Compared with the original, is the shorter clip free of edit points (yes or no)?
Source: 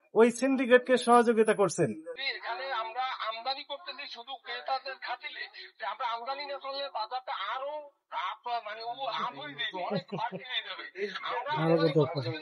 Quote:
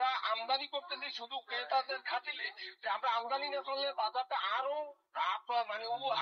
yes